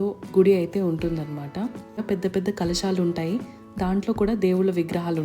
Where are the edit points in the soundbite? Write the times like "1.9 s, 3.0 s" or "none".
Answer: 2.0 s